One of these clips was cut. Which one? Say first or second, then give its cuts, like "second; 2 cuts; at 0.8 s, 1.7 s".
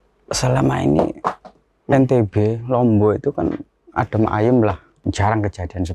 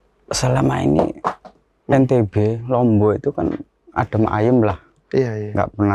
first; 1 cut; at 4.9 s